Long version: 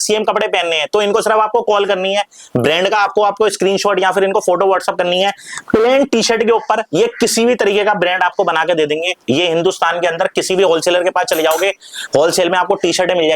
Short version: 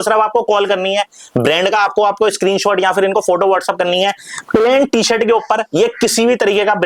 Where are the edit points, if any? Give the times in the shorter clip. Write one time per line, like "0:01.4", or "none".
none